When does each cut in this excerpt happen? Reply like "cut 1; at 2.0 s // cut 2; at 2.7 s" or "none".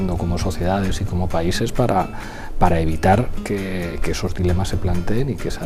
none